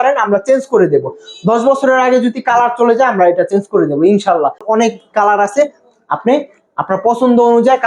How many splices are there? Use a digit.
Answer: 1